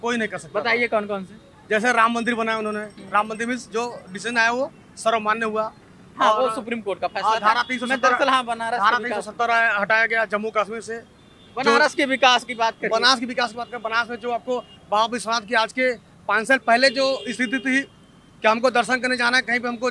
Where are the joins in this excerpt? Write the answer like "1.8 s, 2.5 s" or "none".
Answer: none